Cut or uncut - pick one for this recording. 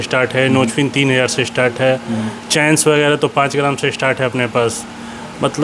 uncut